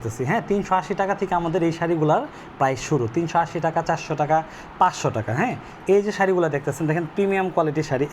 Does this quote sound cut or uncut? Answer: uncut